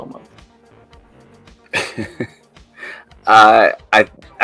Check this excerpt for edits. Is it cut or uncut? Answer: uncut